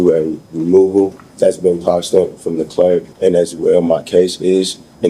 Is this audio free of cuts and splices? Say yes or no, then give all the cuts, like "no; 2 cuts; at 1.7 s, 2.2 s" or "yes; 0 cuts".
no; 2 cuts; at 1.2 s, 3.1 s